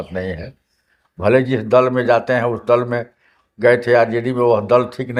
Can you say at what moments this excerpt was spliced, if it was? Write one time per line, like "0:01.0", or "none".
none